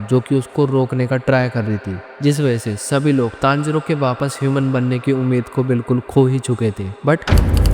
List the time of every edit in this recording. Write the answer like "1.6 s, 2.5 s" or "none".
2.0 s, 7.0 s